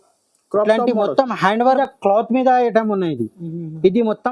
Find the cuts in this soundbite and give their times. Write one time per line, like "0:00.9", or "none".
0:01.8